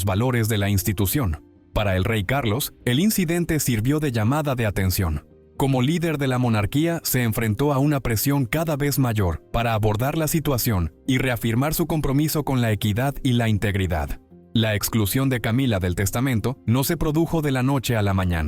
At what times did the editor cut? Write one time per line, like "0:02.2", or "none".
0:09.4